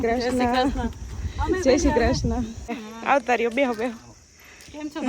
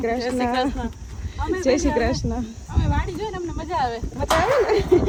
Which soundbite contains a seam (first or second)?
first